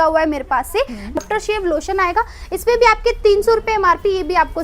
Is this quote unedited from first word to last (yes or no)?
no